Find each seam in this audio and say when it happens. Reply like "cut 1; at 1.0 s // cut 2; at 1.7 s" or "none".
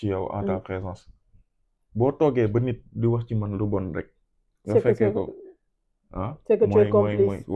none